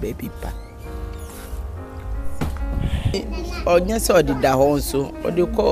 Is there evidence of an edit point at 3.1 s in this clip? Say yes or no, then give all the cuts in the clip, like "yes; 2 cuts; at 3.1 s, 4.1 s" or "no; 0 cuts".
yes; 1 cut; at 3.1 s